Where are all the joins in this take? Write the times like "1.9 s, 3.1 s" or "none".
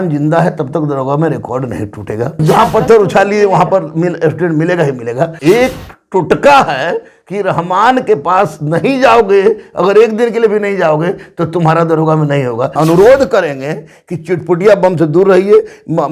2.4 s, 5.3 s, 12.7 s